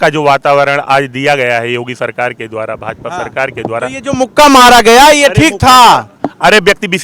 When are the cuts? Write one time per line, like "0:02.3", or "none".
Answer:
none